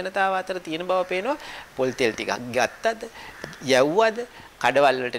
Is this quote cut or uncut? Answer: uncut